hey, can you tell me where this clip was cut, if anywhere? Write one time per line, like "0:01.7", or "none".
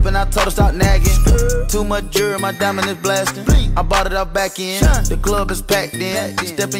0:01.1